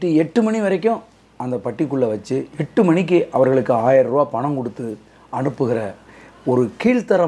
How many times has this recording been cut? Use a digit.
0